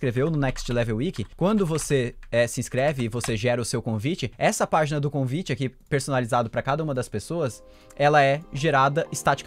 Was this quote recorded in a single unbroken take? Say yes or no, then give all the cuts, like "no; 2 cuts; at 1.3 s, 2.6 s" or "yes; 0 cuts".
no; 2 cuts; at 1.3 s, 4.3 s